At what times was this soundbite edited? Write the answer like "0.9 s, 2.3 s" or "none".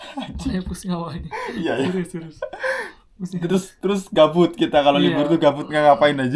none